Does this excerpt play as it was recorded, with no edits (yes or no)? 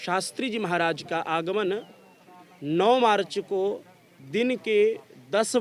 yes